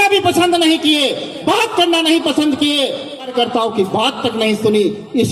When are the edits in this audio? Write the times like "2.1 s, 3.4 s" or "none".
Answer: 3.3 s